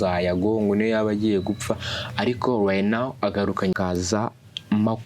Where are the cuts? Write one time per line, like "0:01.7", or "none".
0:03.7